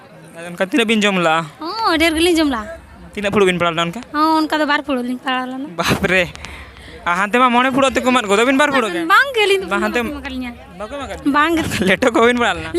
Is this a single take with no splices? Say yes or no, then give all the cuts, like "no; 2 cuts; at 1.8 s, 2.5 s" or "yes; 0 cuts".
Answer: no; 1 cut; at 11.7 s